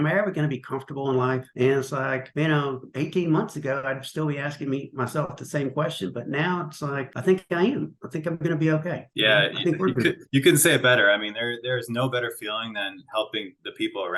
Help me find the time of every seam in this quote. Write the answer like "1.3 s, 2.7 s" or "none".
none